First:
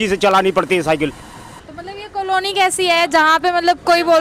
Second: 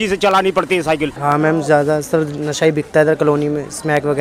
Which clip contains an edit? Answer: second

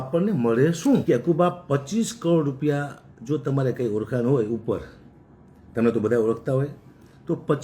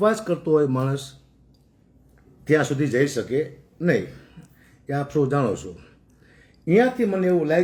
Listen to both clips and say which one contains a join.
first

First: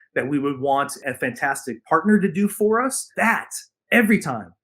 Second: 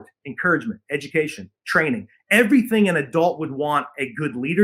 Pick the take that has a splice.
first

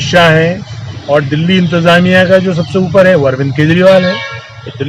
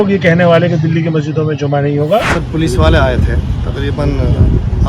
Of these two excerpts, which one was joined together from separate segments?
second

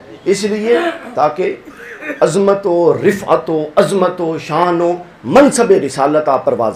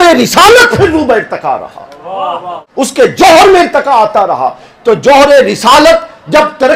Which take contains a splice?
second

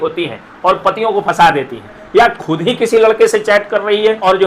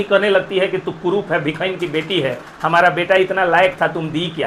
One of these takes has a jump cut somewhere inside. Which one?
first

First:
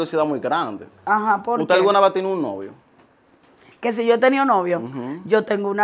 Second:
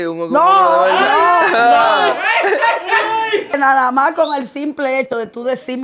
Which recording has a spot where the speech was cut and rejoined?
second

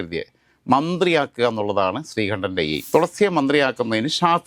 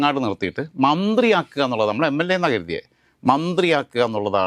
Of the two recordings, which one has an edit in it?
first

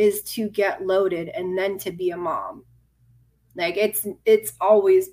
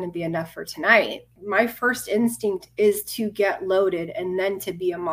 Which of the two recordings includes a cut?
second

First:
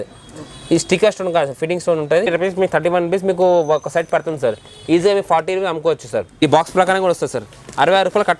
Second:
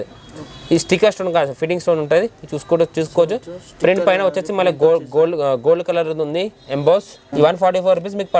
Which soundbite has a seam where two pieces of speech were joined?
first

